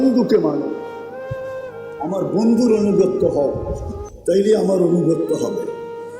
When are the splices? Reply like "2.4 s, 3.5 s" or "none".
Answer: 0.8 s, 2.0 s